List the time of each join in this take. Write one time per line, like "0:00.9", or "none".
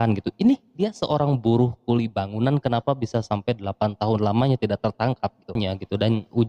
0:05.6